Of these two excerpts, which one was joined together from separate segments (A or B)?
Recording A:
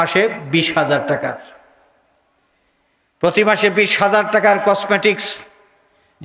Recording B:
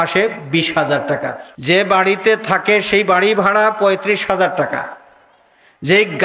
B